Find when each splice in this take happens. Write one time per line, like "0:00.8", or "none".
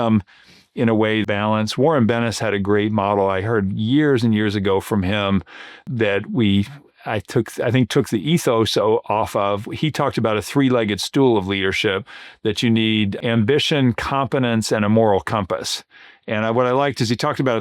0:01.2
0:05.8
0:13.1